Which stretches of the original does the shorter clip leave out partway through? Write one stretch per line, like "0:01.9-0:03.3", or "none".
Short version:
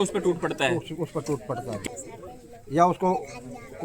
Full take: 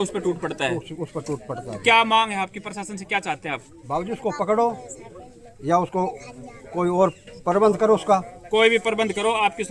0:01.8-0:04.7